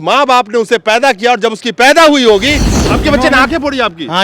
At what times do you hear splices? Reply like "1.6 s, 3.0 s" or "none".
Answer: 2.7 s